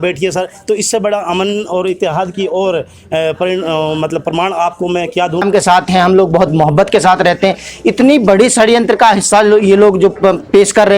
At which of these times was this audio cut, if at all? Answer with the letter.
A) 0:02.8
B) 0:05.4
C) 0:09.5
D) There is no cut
B